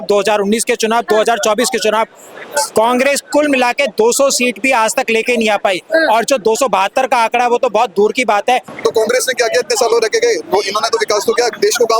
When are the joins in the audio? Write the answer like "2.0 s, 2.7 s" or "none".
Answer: 8.7 s